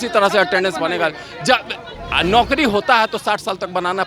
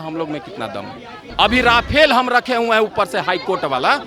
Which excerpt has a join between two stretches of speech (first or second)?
second